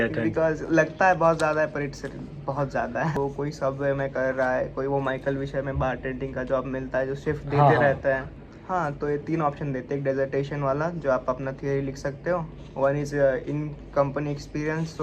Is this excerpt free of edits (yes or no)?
no